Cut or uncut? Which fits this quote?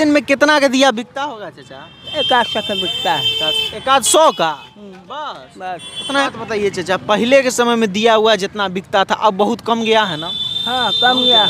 cut